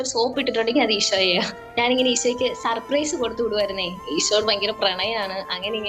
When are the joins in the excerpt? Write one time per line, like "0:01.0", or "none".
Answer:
0:01.6
0:04.0